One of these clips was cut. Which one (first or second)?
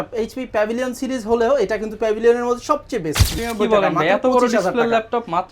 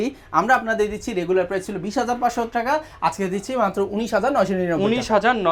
first